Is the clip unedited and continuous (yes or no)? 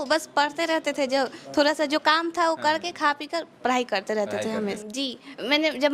no